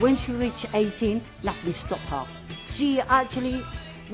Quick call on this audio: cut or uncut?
uncut